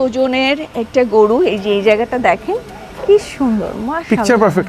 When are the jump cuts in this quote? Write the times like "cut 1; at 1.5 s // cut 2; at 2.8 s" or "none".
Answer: none